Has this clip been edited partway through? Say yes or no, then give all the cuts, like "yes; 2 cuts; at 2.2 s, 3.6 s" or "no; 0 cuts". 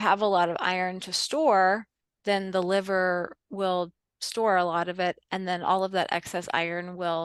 no; 0 cuts